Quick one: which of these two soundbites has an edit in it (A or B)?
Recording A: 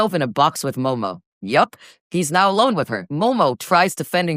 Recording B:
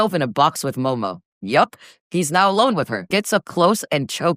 B